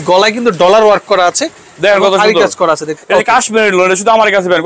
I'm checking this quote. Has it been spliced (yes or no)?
yes